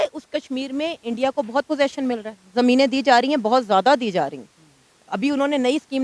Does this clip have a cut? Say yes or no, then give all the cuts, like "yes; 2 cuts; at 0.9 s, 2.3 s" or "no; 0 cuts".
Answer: no; 0 cuts